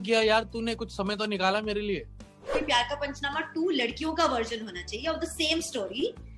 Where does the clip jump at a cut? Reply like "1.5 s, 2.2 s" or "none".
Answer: 2.6 s